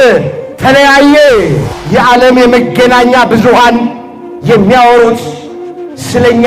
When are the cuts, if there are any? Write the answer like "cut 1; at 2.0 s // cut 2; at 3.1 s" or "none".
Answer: cut 1; at 1.7 s